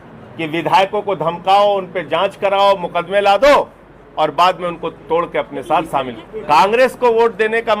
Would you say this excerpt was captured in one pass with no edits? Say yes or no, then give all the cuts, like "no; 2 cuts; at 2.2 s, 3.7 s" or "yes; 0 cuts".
no; 1 cut; at 6.2 s